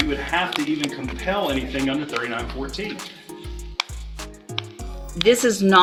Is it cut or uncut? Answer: uncut